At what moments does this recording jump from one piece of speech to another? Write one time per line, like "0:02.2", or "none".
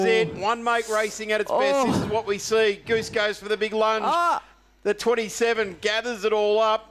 none